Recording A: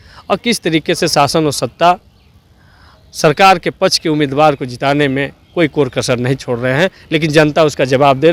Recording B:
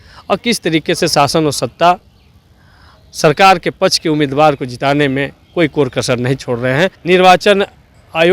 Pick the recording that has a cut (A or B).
B